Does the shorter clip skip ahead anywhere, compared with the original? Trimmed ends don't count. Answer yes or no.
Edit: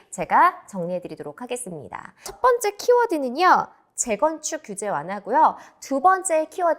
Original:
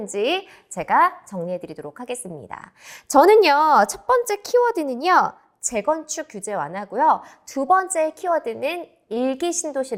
yes